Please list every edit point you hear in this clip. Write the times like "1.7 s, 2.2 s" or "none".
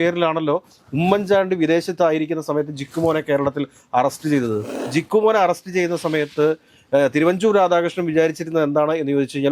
4.7 s